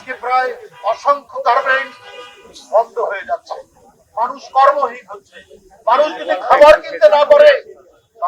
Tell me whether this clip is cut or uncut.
uncut